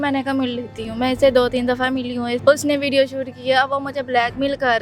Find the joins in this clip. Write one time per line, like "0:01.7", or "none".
0:02.4